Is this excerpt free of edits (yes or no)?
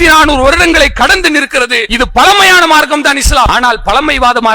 no